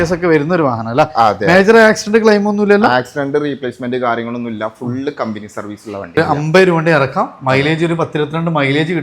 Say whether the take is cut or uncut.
cut